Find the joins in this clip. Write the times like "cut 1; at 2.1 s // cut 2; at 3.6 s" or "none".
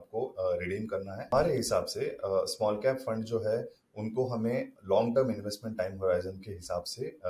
cut 1; at 1.3 s